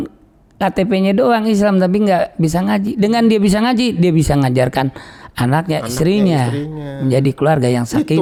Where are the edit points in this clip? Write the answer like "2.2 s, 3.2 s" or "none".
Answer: none